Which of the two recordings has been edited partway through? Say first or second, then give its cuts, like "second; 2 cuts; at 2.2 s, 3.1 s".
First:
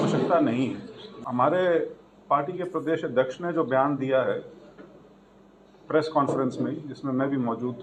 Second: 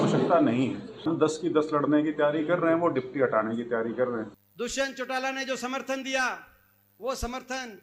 second; 2 cuts; at 1.1 s, 4.4 s